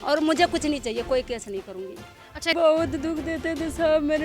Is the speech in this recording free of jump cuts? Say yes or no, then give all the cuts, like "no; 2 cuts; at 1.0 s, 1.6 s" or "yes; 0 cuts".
no; 1 cut; at 2.5 s